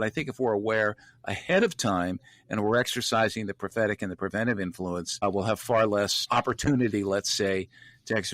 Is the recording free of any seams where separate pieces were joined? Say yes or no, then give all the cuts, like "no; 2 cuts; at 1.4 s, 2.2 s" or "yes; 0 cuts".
no; 2 cuts; at 5.2 s, 6.2 s